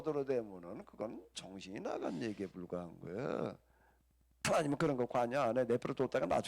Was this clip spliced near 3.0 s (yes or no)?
no